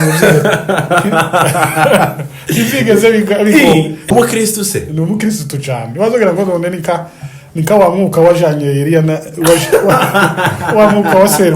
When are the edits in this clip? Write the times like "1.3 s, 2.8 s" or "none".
4.1 s